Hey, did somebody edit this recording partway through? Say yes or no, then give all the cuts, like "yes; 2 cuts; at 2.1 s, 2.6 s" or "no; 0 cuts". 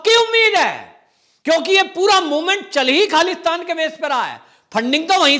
no; 0 cuts